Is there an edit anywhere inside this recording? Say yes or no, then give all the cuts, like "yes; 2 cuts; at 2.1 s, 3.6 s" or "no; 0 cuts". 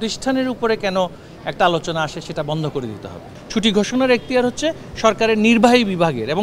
yes; 1 cut; at 3.4 s